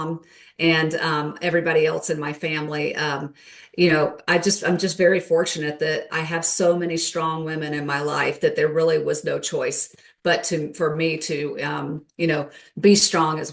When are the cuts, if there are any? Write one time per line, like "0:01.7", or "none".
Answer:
none